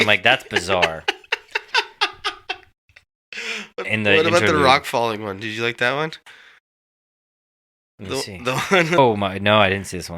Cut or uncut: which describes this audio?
cut